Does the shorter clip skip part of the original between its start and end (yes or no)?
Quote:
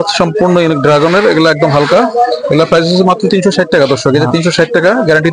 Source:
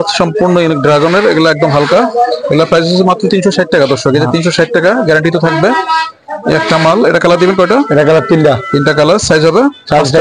no